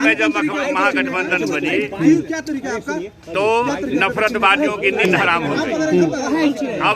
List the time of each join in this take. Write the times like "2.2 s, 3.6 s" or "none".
none